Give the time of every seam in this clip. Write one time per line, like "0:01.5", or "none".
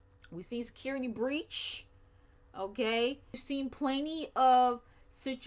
0:03.4